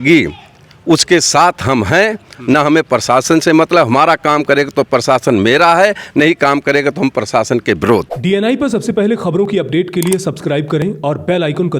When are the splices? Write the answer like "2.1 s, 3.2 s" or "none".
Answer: 8.1 s